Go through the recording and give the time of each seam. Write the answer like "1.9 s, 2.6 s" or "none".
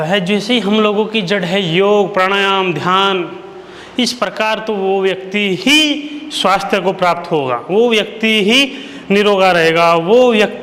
none